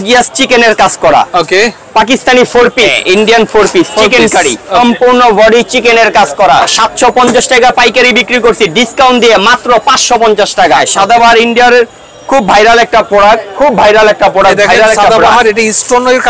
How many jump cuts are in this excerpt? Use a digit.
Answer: 4